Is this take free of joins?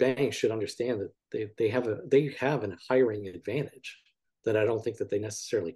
yes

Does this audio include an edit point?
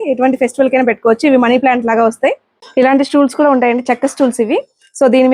yes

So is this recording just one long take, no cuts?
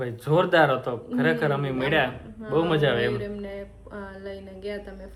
yes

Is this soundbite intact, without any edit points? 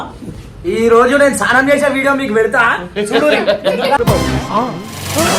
yes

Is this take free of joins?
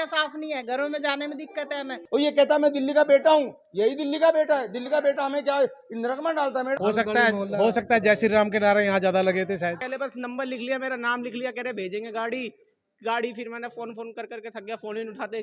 no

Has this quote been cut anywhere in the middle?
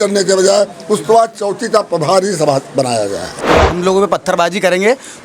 yes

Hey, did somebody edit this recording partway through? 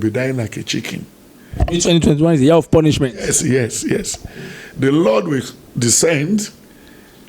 no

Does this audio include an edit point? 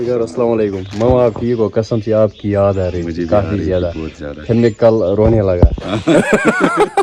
no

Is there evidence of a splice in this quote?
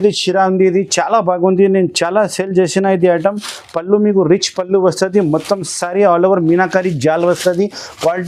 no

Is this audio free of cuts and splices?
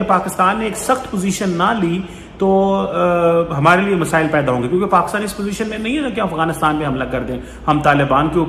yes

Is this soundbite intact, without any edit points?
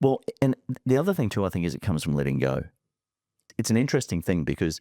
no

